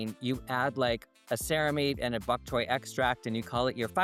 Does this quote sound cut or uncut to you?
uncut